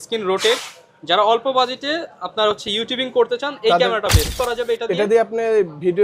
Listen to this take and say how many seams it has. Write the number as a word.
one